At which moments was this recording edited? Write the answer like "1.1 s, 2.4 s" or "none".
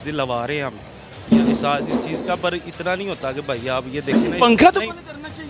none

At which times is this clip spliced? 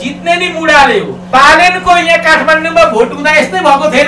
1.3 s

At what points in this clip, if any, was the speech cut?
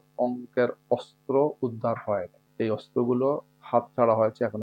2.4 s

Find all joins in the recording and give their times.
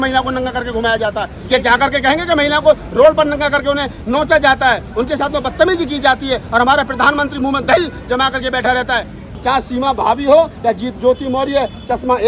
9.3 s

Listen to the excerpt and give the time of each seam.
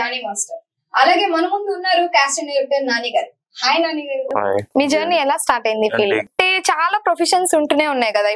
4.7 s, 6.3 s

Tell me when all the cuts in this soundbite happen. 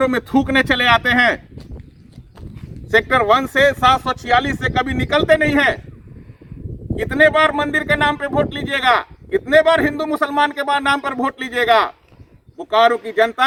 none

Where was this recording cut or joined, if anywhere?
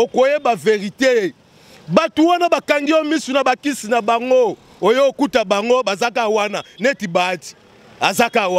none

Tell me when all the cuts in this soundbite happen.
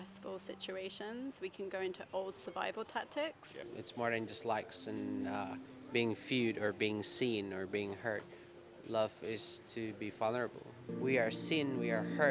3.7 s, 10.9 s

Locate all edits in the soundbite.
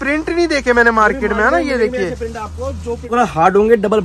3.1 s

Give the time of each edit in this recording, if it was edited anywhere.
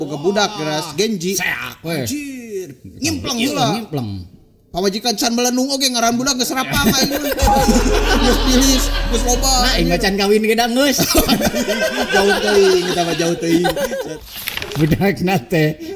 14.6 s

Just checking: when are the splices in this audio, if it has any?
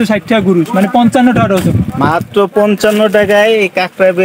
none

